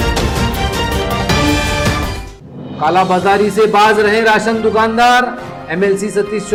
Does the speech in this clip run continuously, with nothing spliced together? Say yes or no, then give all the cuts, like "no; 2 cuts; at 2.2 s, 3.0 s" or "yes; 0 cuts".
yes; 0 cuts